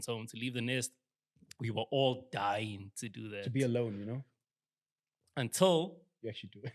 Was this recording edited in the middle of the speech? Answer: no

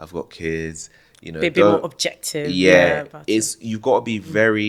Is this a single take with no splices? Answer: yes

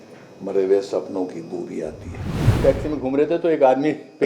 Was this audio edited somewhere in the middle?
yes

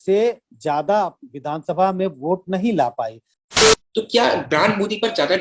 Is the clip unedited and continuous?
no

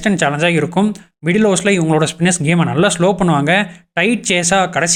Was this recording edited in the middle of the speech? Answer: no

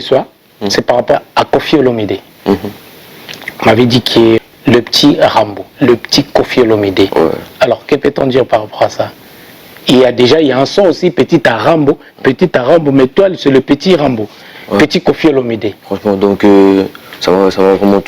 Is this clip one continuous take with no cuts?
no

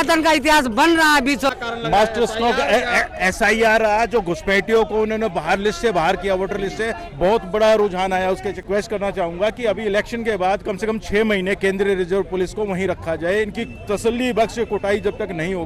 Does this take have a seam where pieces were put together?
yes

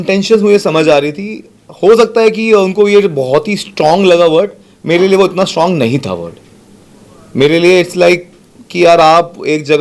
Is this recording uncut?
yes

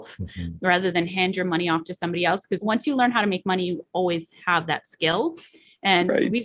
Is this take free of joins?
no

